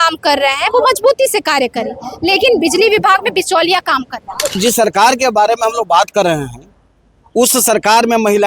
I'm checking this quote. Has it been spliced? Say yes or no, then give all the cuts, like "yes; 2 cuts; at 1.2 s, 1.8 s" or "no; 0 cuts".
yes; 1 cut; at 4.6 s